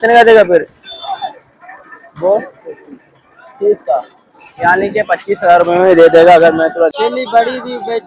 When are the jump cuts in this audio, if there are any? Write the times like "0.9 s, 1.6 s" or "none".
6.9 s